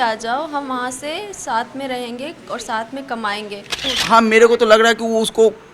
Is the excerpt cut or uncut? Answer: cut